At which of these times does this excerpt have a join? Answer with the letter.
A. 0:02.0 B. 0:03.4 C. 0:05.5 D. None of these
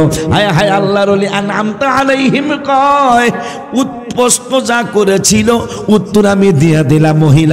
D